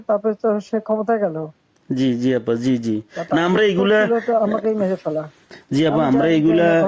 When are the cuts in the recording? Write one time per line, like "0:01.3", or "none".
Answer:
none

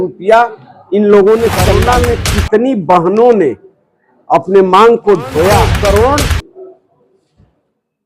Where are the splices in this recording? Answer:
0:01.8
0:05.7

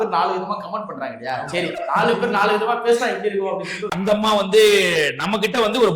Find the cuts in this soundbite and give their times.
0:03.9

